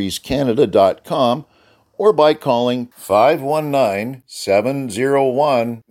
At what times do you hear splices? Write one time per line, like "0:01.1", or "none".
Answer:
none